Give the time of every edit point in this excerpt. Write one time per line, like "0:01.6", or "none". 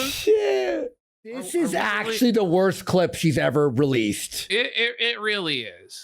0:01.4